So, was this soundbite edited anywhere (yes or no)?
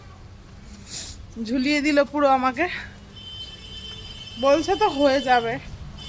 no